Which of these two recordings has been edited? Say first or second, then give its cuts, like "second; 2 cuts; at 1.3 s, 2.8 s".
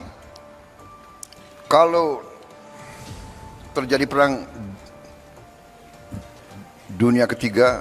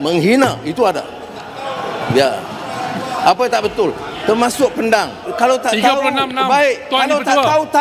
first; 2 cuts; at 2.3 s, 3.7 s